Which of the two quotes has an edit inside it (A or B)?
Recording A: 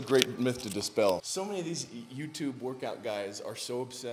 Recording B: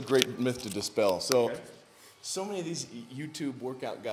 A